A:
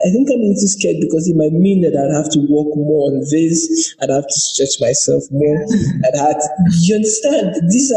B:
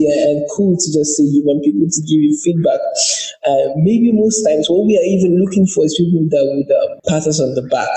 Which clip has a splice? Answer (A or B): B